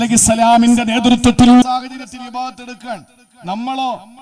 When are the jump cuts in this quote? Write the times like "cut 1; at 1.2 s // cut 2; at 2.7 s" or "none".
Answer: cut 1; at 1.6 s